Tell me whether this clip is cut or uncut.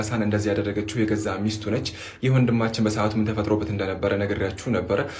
uncut